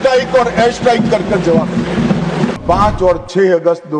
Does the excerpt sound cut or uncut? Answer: cut